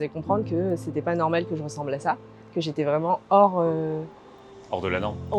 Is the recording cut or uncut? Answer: uncut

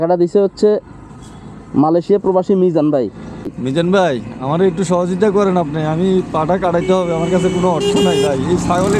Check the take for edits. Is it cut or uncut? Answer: cut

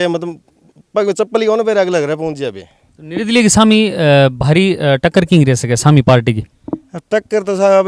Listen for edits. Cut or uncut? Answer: uncut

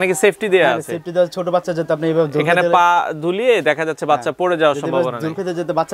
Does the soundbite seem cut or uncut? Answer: uncut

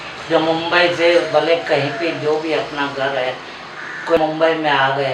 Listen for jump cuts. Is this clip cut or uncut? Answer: cut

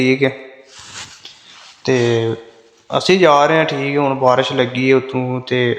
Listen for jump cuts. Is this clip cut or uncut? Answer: uncut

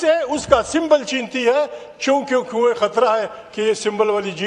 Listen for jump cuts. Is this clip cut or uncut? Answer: uncut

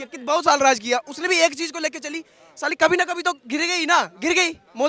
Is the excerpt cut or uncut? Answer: uncut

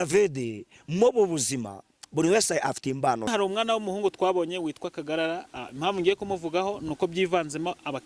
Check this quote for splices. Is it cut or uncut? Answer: cut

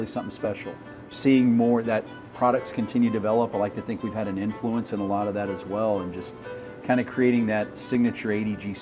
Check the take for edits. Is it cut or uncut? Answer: cut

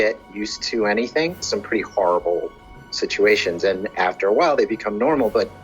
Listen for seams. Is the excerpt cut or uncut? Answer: cut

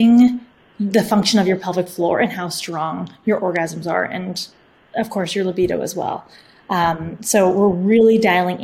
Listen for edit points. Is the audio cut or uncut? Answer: uncut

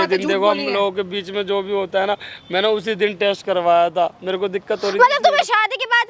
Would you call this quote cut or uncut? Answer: uncut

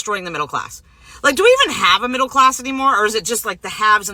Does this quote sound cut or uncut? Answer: uncut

